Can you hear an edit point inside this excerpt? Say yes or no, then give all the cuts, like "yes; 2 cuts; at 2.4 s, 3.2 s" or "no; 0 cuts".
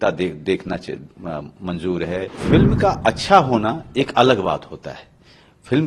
yes; 1 cut; at 2.4 s